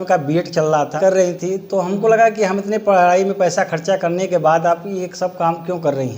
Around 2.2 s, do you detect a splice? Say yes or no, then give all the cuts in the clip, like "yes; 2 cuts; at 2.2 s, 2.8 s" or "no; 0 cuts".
no; 1 cut; at 0.9 s